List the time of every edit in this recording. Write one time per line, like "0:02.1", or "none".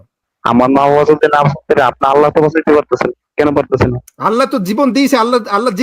0:03.2
0:04.1